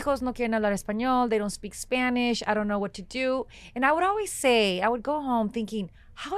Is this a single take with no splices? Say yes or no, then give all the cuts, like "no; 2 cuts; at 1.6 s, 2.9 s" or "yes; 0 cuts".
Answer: yes; 0 cuts